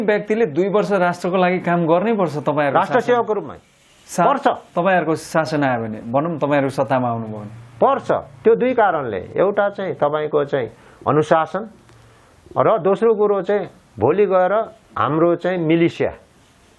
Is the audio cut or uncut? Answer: uncut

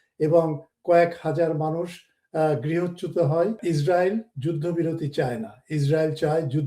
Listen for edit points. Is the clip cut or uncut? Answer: cut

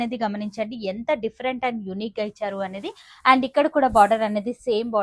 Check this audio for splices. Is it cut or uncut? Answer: uncut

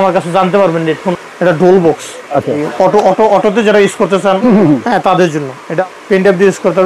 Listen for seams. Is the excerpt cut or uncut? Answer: cut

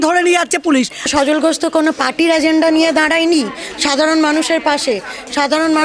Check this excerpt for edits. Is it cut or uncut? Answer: cut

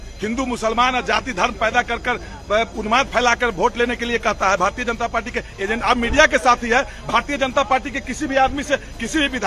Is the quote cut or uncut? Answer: uncut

